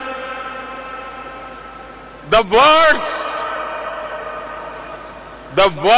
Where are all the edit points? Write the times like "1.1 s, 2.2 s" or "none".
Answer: 5.0 s